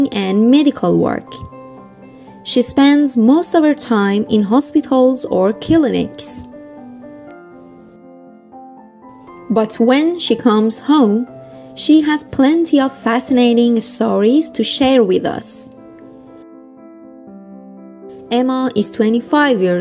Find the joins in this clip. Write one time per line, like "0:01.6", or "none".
0:06.1
0:09.5
0:15.4
0:18.3